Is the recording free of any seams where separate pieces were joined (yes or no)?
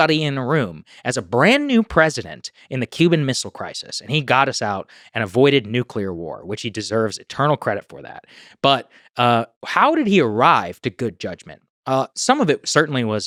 yes